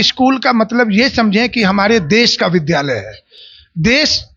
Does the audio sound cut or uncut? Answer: uncut